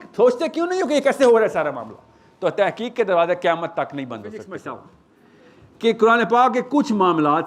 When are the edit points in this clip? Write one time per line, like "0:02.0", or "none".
0:04.4